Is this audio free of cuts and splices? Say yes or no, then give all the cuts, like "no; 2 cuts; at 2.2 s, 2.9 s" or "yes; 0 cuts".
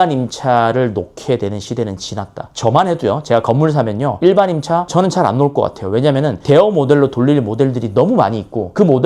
yes; 0 cuts